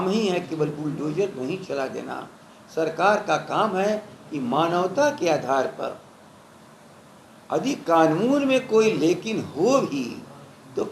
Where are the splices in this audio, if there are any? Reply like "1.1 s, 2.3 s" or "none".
none